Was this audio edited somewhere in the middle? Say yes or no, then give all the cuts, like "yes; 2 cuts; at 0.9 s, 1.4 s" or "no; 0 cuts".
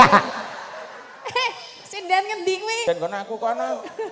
yes; 1 cut; at 2.8 s